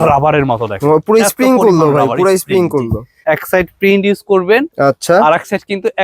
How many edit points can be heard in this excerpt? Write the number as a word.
one